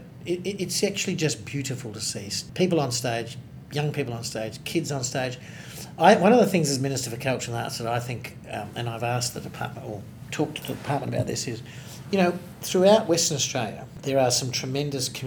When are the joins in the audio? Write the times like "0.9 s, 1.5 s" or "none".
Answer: 2.4 s, 13.9 s